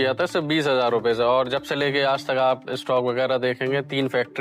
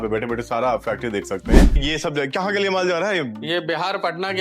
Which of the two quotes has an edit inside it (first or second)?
second